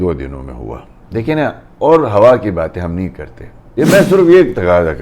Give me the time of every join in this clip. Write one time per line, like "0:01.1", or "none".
0:03.7